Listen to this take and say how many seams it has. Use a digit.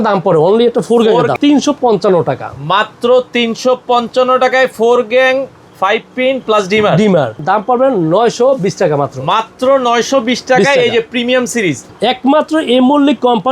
3